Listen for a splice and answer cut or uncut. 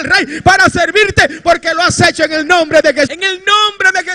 cut